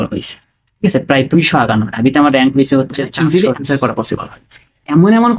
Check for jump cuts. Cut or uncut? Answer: cut